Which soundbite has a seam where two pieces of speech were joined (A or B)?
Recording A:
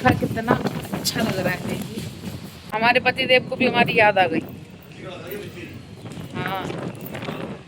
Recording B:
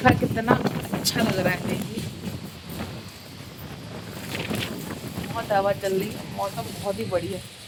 A